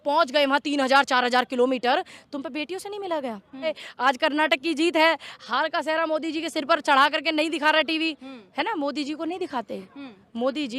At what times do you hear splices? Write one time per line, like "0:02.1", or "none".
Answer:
0:03.8